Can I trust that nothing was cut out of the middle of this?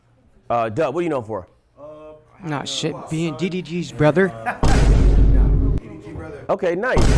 yes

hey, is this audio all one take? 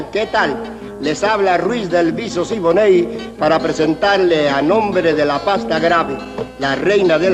yes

